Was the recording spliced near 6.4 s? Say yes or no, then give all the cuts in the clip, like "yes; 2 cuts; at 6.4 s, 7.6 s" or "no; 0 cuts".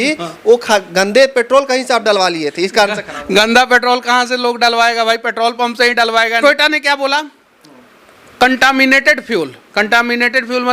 yes; 1 cut; at 6.4 s